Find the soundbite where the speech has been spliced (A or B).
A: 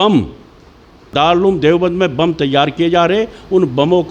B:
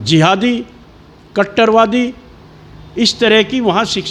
A